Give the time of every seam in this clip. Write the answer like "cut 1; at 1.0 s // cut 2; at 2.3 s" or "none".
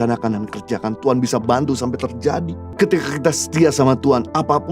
cut 1; at 2.6 s